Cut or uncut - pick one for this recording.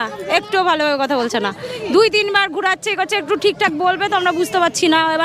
uncut